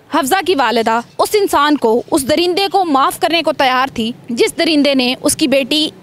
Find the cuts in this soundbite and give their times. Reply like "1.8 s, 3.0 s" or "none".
1.1 s, 4.2 s

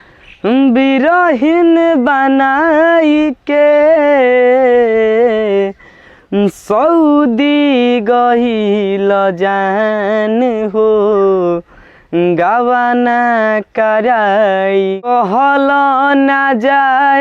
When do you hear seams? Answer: 15.0 s

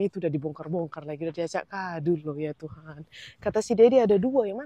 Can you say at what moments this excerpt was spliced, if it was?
none

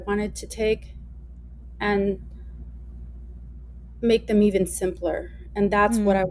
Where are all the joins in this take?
none

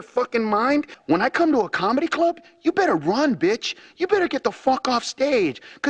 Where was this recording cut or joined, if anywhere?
none

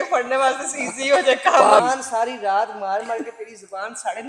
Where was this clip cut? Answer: 1.8 s

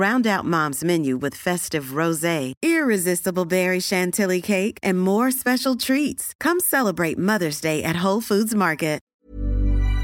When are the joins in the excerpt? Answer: 9.1 s

